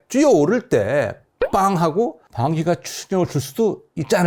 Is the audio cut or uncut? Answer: uncut